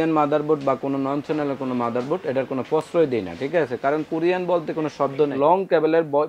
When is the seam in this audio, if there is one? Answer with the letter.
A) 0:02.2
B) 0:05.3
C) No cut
B